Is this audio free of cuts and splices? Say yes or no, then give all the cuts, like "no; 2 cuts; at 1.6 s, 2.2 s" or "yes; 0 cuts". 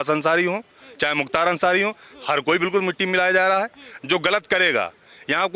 yes; 0 cuts